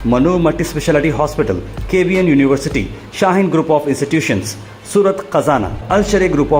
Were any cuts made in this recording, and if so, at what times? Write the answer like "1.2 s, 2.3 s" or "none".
none